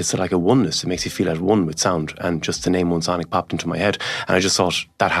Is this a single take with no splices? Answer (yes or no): yes